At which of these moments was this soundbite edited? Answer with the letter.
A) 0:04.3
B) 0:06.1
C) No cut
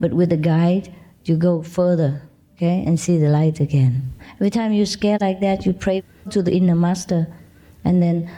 A